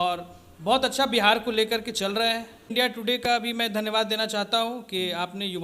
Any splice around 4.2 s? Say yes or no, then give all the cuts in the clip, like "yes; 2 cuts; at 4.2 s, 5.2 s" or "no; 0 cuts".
no; 1 cut; at 2.7 s